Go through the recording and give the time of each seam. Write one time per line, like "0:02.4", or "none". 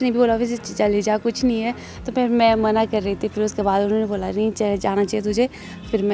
none